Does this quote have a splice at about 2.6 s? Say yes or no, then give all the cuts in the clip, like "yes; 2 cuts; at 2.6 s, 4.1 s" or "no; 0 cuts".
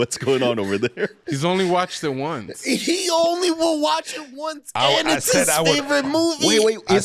no; 1 cut; at 1.2 s